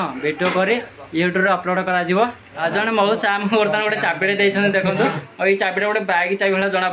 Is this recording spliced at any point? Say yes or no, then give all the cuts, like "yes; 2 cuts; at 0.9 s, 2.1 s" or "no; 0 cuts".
yes; 1 cut; at 2.6 s